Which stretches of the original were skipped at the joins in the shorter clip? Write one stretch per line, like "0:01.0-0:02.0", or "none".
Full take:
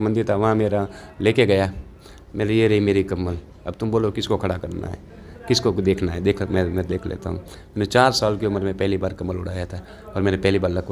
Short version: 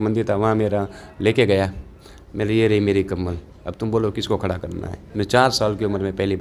0:05.0-0:07.6